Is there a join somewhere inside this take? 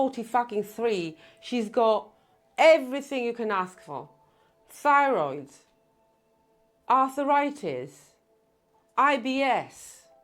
no; 0 cuts

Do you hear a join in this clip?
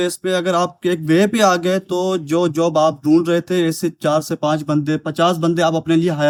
no; 0 cuts

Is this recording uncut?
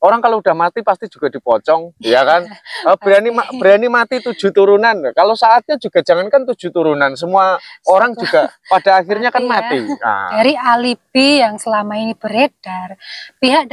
no; 1 cut; at 10.3 s

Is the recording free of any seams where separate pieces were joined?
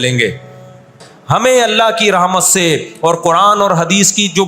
no; 1 cut; at 1.1 s

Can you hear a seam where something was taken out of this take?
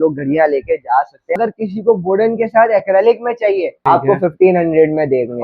yes; 2 cuts; at 1.4 s, 3.7 s

